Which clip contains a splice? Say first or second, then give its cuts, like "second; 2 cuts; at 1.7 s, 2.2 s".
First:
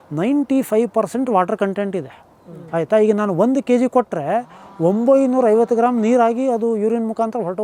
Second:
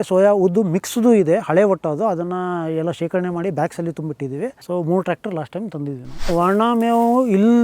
second; 2 cuts; at 4.6 s, 6.2 s